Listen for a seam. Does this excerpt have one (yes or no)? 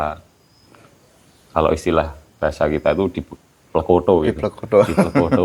no